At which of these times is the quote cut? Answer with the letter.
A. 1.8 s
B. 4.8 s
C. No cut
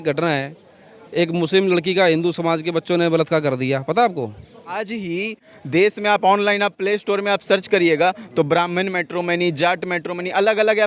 B